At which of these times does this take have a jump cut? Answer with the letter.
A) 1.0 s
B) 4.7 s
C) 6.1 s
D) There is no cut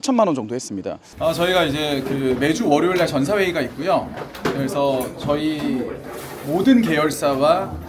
A